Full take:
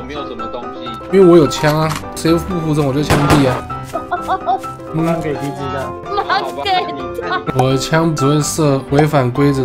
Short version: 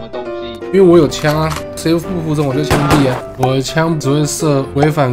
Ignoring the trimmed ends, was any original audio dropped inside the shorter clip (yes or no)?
yes